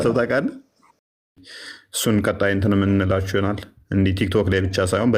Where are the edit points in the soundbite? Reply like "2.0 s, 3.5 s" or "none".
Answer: 1.3 s